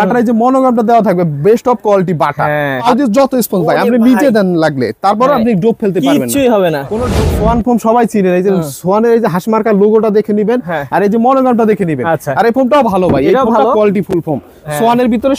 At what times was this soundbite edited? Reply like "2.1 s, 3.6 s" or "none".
2.9 s, 7.0 s